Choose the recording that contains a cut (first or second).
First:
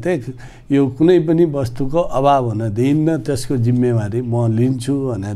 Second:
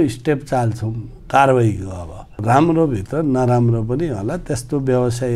second